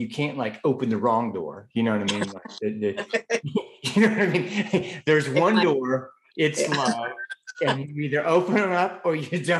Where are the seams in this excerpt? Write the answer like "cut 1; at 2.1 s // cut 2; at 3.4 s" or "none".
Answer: none